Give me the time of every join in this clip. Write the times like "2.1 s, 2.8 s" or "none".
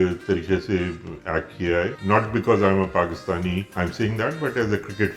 2.0 s, 3.7 s